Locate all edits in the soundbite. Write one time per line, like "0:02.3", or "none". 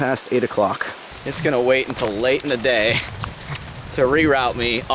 0:01.2